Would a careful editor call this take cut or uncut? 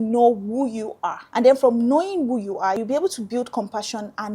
cut